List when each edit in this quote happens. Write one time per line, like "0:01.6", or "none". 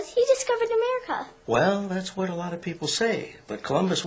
0:03.1